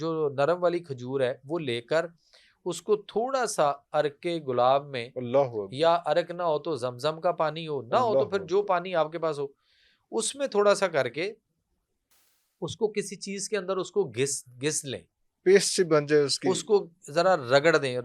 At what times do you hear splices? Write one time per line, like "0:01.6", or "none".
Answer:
none